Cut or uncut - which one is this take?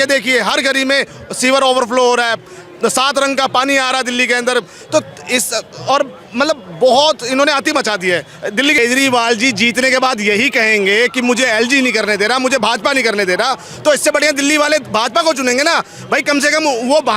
cut